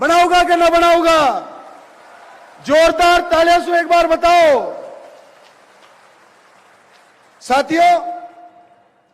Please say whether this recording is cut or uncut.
uncut